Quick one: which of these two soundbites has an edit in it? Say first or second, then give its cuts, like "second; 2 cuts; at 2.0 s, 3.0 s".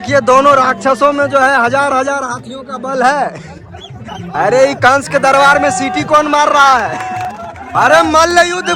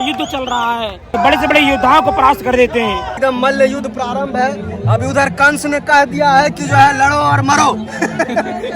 second; 2 cuts; at 1.0 s, 3.1 s